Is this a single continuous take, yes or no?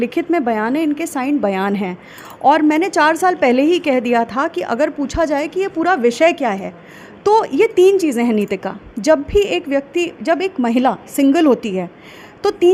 yes